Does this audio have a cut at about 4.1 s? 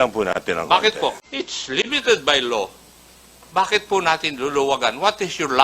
no; 1 cut; at 1.3 s

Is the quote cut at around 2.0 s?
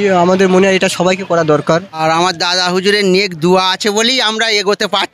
yes; 1 cut; at 2.0 s

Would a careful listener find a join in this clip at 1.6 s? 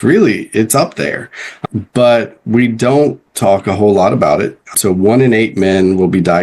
yes; 2 cuts; at 1.6 s, 4.7 s

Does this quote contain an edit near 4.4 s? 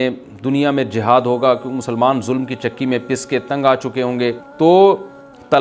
yes; 1 cut; at 4.4 s

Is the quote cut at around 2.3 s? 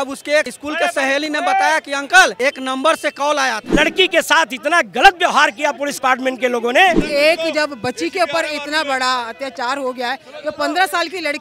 yes; 3 cuts; at 2.3 s, 3.7 s, 7.0 s

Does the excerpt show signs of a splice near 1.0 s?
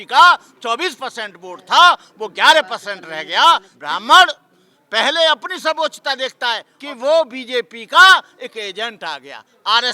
no; 2 cuts; at 3.7 s, 6.7 s

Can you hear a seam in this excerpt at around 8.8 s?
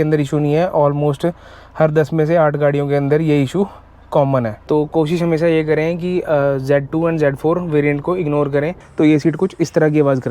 yes; 2 cuts; at 4.6 s, 8.8 s

